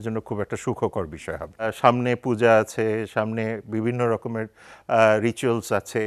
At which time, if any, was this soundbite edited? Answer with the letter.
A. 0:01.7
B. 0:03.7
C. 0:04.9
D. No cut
A